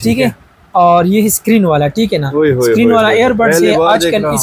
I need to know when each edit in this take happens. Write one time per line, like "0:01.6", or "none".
none